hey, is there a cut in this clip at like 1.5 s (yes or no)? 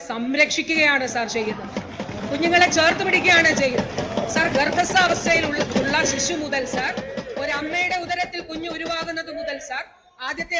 no